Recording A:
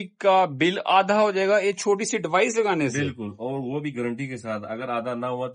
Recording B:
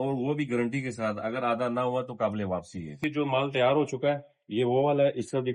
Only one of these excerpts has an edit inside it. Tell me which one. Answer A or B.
B